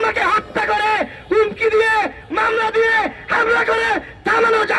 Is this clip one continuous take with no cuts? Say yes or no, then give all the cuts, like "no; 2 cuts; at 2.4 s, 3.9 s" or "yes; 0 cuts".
yes; 0 cuts